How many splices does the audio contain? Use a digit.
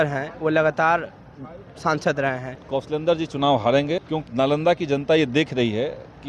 2